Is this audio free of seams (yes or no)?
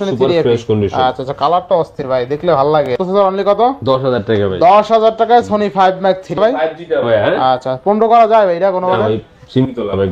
no